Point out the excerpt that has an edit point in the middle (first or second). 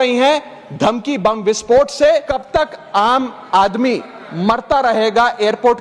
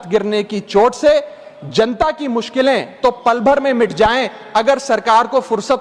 first